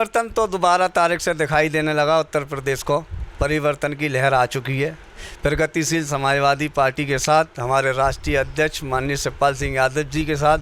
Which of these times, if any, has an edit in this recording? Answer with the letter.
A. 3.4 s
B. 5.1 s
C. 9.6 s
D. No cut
D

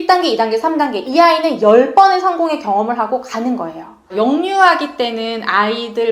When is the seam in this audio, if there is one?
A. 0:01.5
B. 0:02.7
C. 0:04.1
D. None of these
C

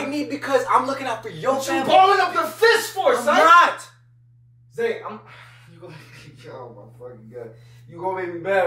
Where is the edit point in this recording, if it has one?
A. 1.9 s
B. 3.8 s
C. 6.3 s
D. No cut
D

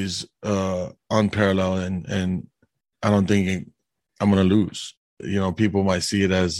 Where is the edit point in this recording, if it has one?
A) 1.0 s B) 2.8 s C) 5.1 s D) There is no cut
C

